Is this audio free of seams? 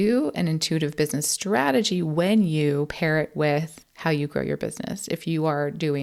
yes; 0 cuts

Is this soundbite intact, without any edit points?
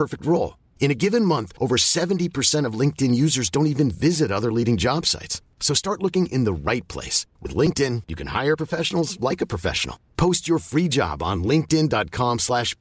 yes; 0 cuts

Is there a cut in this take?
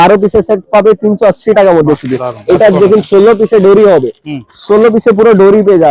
no; 0 cuts

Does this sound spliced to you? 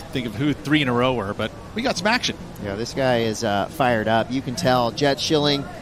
no; 0 cuts

